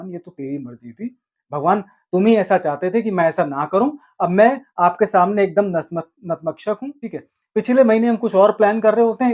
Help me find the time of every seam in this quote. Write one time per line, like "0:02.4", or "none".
0:06.9